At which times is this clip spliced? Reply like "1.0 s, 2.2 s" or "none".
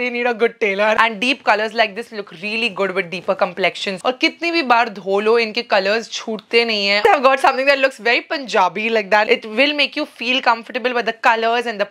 1.0 s, 3.9 s, 7.0 s, 9.3 s